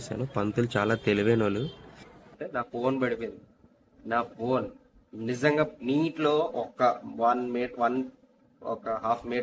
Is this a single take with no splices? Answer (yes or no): no